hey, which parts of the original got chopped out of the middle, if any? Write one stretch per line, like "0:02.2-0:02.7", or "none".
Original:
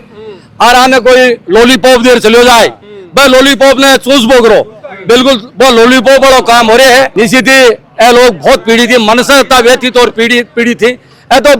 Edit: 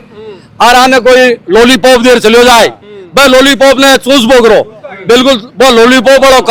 none